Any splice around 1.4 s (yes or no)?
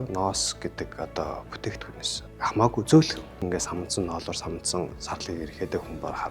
no